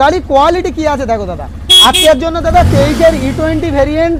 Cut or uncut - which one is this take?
uncut